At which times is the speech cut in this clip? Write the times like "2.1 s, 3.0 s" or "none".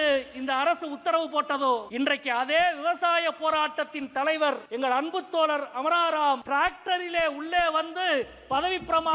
1.9 s, 4.7 s, 6.4 s